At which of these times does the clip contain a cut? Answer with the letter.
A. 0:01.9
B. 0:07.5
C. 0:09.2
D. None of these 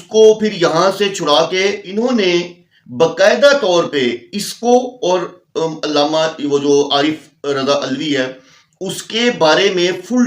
A